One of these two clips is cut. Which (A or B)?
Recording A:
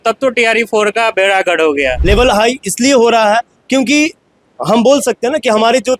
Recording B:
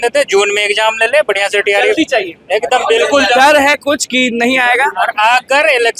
A